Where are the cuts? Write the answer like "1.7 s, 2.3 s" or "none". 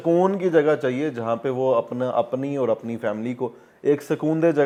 none